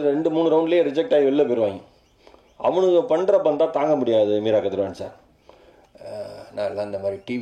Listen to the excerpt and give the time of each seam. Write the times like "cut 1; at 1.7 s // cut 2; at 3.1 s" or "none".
none